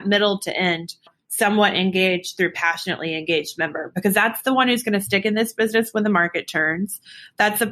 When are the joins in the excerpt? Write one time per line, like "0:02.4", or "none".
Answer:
0:01.2